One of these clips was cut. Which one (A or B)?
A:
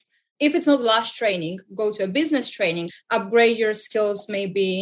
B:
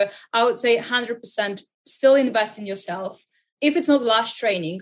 A